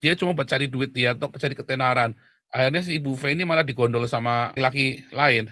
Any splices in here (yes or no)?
yes